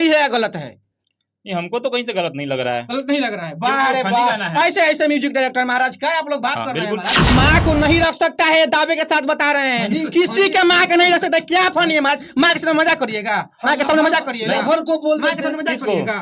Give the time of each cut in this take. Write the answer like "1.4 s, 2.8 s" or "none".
7.3 s